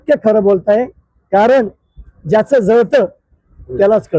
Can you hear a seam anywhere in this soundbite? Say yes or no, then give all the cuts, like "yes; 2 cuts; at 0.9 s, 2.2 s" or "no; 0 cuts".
no; 0 cuts